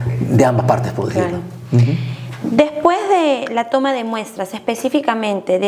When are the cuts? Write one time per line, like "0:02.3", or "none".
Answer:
none